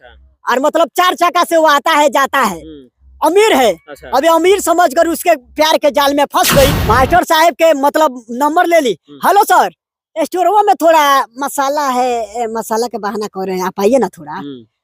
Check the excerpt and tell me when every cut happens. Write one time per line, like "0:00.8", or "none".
0:06.8